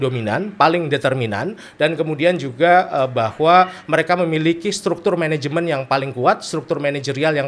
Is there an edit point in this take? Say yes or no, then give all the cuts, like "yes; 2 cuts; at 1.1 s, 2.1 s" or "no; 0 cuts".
no; 0 cuts